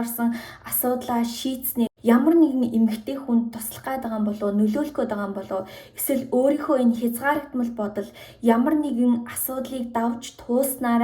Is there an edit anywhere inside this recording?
no; 0 cuts

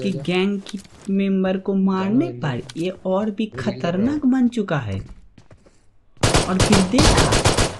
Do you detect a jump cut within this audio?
no; 0 cuts

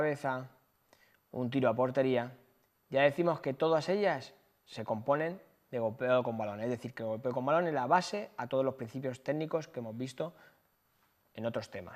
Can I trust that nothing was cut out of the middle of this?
no; 1 cut; at 11.0 s

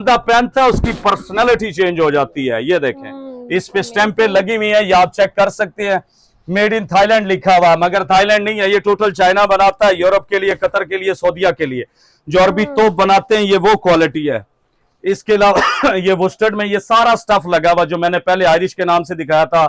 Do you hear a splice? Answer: no; 0 cuts

